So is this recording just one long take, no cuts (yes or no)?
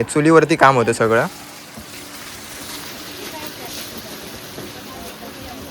yes